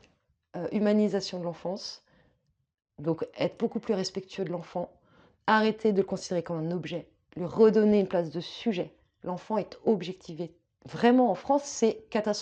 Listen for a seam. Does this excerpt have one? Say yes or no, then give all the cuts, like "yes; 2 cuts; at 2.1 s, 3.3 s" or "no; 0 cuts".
no; 0 cuts